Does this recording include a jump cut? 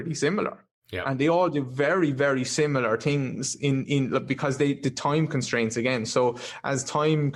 no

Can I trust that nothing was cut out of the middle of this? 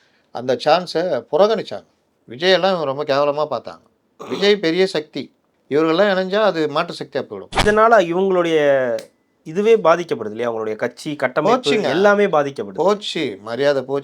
no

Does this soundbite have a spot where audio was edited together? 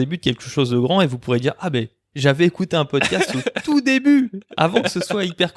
no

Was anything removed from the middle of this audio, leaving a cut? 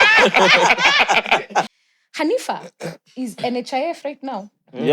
yes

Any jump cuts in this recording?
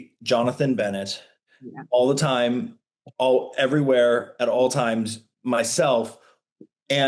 no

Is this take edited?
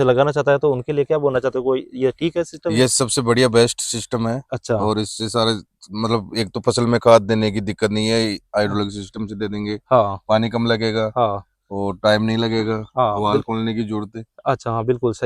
no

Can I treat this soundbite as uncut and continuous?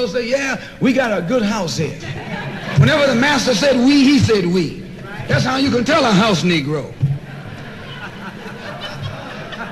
yes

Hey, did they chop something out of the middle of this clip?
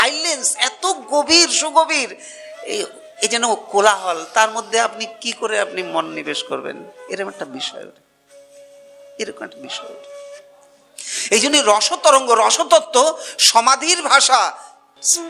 no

